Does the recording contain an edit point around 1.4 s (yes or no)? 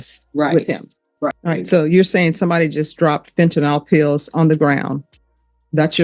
yes